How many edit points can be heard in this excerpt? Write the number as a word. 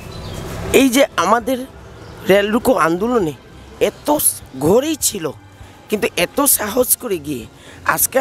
zero